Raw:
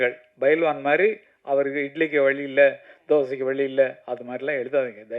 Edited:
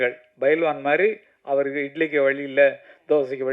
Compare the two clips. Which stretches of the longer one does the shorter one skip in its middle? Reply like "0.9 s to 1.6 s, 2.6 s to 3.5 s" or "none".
none